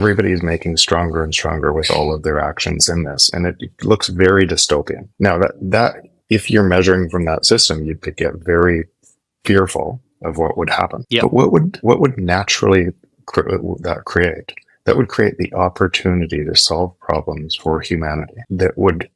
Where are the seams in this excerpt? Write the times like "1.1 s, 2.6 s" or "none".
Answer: 5.0 s

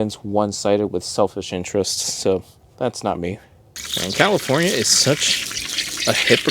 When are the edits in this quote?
3.8 s

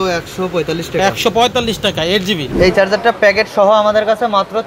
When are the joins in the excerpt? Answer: 2.5 s

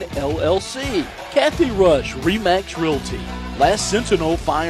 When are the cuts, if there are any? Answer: 1.2 s

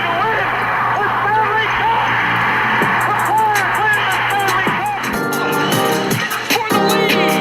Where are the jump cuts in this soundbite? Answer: 6.1 s

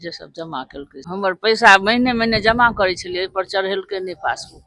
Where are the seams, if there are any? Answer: 1.0 s

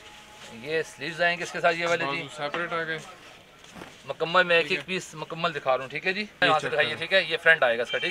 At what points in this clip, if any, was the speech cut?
6.4 s

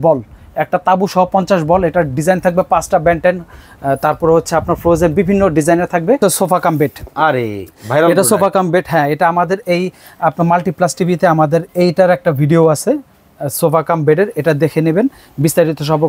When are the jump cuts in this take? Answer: 6.2 s

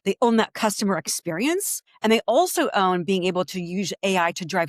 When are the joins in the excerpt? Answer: 1.8 s

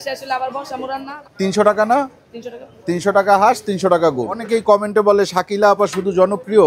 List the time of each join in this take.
1.1 s, 4.4 s

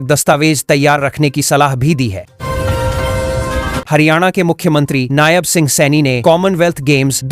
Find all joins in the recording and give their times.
2.3 s, 3.8 s

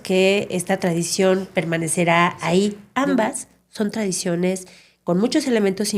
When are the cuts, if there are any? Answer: 2.8 s

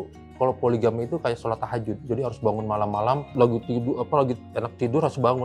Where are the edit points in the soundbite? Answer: 3.3 s

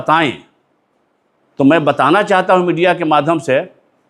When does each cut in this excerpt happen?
none

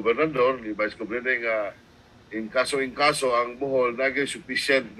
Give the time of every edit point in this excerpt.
none

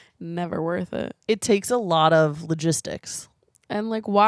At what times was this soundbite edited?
1.2 s

